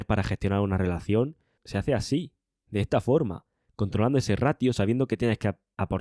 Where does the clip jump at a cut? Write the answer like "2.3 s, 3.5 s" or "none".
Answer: 1.6 s

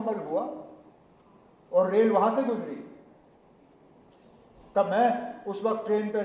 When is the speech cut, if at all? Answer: none

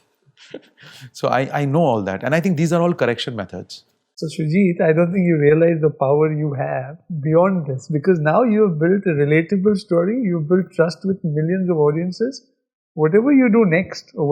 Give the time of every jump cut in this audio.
4.2 s

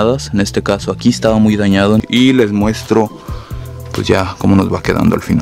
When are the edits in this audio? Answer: 2.1 s

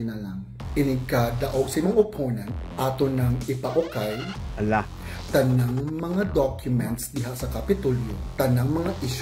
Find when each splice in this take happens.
none

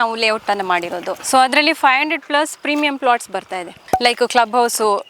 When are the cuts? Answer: 1.2 s, 3.8 s

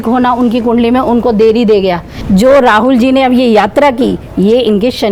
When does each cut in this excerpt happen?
2.1 s

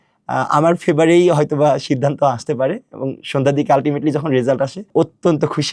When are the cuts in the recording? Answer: 4.8 s

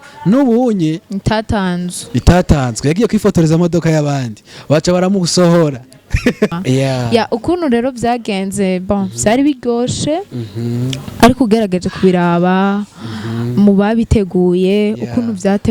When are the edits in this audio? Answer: 6.5 s

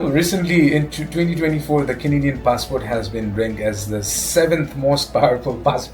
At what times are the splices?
none

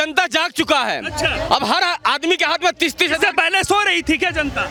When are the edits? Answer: none

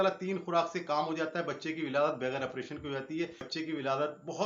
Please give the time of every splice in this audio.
3.4 s

